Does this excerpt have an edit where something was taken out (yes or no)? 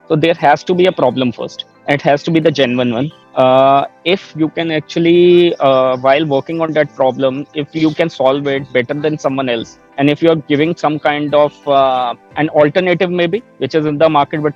no